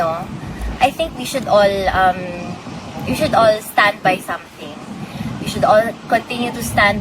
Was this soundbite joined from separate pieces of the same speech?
no; 0 cuts

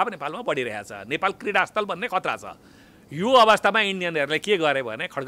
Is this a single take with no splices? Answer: yes; 0 cuts

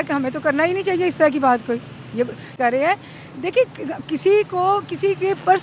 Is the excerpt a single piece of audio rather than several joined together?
no; 1 cut; at 2.6 s

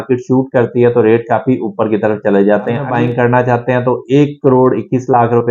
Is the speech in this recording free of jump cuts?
no; 1 cut; at 2.9 s

